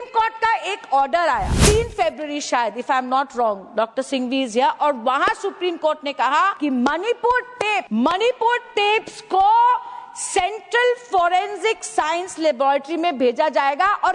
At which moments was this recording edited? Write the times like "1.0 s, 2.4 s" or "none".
1.5 s, 6.5 s, 7.9 s